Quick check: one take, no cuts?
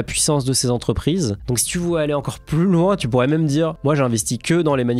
yes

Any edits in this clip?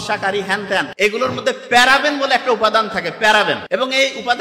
yes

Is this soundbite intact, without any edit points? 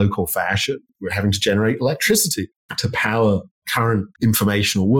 no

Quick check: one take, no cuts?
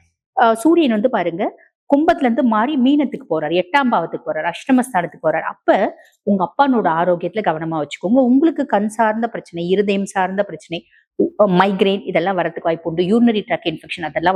yes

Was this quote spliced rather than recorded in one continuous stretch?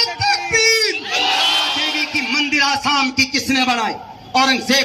yes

